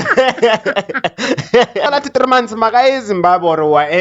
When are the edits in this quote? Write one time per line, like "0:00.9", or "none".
0:01.9